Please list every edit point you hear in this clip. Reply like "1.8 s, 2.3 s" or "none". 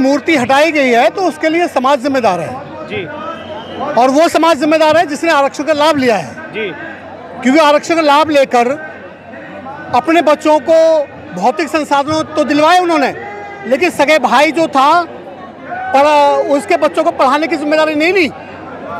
none